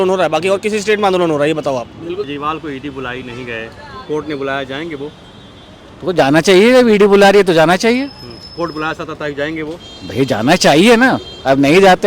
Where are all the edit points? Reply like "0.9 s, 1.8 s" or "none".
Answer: 2.3 s